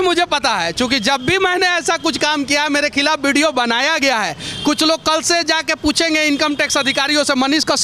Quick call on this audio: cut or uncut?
uncut